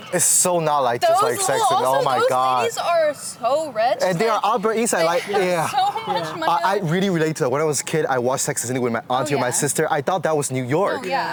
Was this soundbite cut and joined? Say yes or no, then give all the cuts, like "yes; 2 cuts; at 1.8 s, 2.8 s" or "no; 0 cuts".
no; 0 cuts